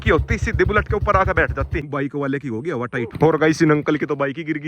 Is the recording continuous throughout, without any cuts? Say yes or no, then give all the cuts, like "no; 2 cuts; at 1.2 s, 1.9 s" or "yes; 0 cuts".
no; 2 cuts; at 1.8 s, 3.1 s